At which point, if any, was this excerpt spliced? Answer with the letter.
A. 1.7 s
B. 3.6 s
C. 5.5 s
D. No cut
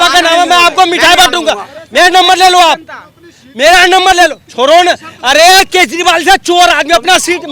D